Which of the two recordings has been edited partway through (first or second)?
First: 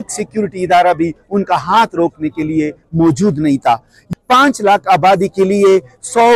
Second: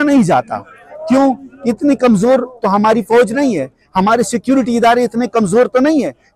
first